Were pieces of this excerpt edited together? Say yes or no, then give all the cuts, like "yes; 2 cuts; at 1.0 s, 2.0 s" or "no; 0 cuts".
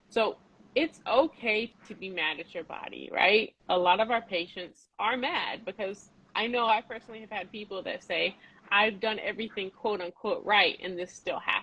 no; 0 cuts